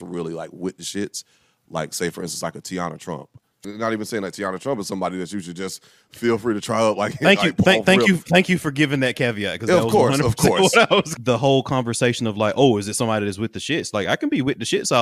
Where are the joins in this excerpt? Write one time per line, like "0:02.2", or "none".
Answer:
0:03.6
0:11.1